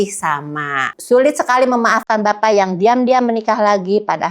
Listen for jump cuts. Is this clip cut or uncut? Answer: cut